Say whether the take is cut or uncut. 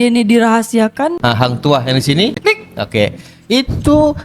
cut